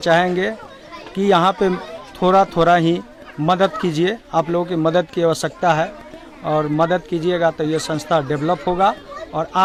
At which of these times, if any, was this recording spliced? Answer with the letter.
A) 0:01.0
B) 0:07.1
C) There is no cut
C